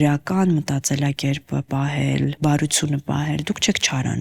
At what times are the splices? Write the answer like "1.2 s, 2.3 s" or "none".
none